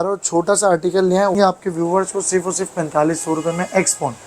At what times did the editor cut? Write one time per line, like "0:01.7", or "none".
0:01.3